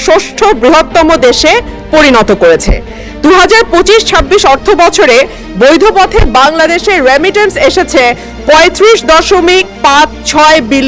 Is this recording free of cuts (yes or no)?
yes